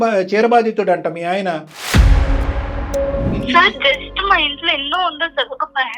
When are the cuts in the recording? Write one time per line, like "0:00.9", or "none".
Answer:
0:03.4